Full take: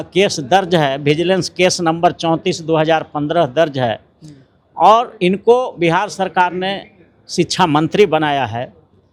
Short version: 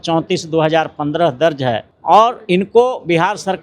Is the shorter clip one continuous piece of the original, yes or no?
no